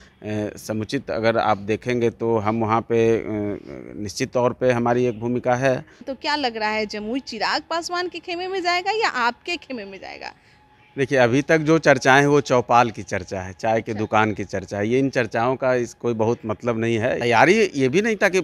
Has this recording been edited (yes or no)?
yes